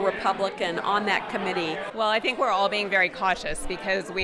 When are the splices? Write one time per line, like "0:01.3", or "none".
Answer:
0:01.9